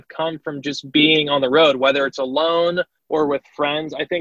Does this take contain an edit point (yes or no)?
yes